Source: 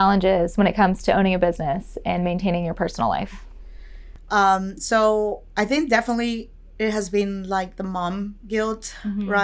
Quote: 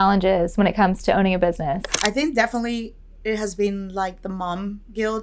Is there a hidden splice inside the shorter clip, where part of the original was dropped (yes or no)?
yes